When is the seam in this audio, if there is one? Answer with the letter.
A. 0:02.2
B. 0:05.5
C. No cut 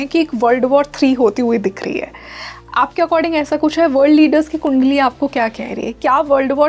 C